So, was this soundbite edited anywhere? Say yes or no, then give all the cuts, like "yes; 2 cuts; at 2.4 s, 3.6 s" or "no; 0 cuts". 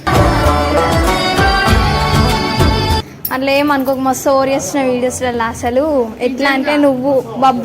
no; 0 cuts